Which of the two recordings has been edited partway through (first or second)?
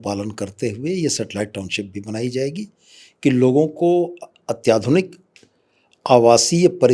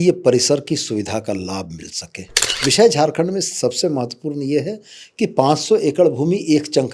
second